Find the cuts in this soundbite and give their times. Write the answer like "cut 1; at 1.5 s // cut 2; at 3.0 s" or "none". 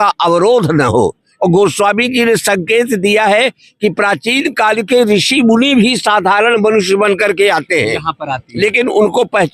cut 1; at 1.3 s